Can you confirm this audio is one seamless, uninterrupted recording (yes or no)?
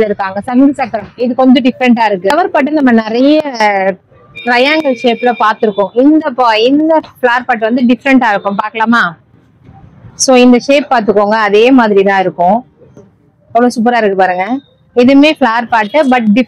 yes